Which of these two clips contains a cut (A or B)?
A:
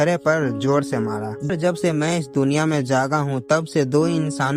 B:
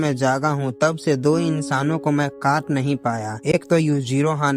A